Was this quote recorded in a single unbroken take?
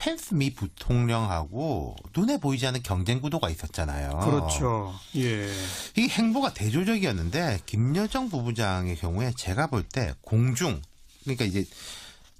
no; 1 cut; at 8.0 s

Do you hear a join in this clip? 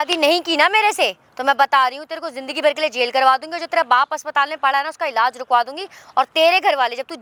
no; 0 cuts

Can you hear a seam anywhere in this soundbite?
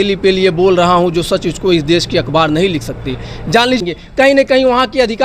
yes; 1 cut; at 3.8 s

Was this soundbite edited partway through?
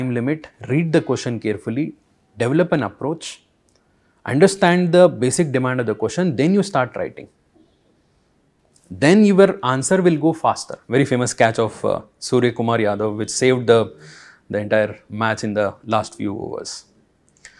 yes; 1 cut; at 10.8 s

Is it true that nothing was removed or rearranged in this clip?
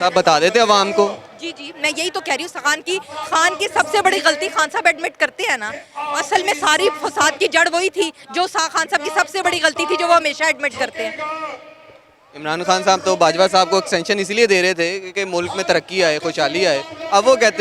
yes; 0 cuts

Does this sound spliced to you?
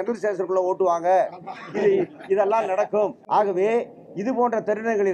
yes; 1 cut; at 3.2 s

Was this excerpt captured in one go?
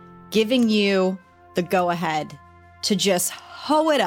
yes; 0 cuts

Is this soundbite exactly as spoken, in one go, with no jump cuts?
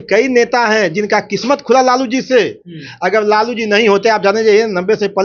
yes; 0 cuts

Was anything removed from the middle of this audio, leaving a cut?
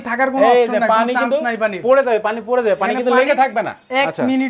no; 0 cuts

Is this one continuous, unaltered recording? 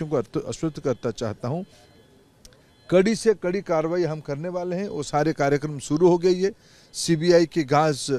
yes; 0 cuts

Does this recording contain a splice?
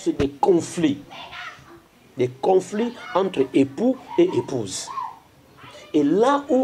no; 0 cuts

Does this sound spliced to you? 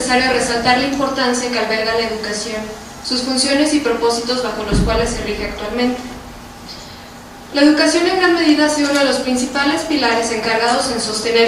no; 0 cuts

